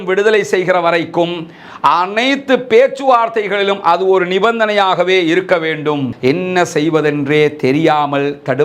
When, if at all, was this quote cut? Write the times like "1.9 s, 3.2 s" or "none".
6.1 s